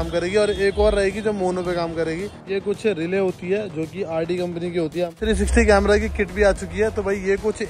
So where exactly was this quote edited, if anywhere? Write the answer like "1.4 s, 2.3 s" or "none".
2.5 s, 5.1 s